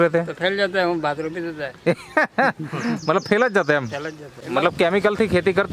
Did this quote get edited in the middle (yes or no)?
yes